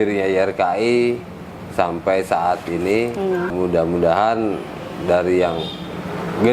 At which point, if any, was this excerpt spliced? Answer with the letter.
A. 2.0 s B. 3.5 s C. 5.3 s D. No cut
B